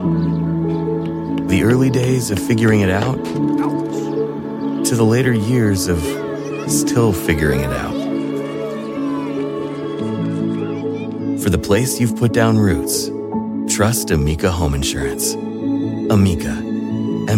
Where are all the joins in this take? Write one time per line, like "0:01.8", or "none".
none

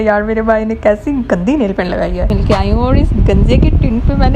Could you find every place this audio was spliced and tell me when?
0:02.3

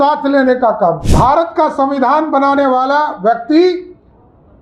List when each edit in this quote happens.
0:01.1

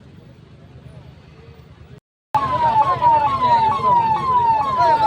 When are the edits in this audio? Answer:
none

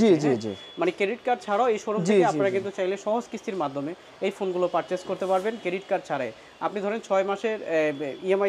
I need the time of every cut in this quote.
none

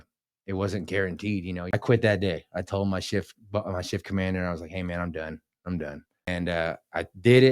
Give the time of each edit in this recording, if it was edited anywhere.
0:01.7
0:06.3

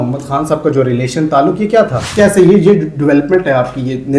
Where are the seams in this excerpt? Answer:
0:02.0

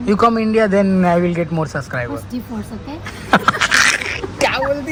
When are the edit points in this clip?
none

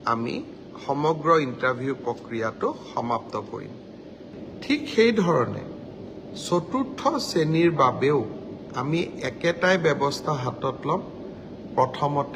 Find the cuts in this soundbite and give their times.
0:04.3

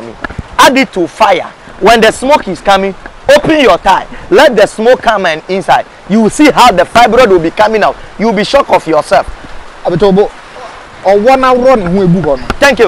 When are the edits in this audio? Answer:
none

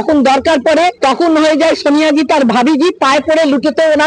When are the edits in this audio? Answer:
0:01.0

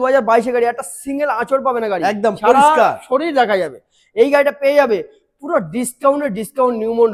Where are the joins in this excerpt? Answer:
none

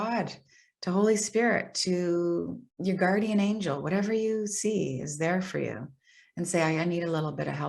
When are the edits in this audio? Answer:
0:02.6

